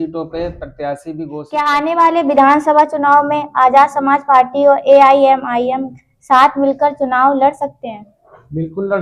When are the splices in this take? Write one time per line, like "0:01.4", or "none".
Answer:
0:01.6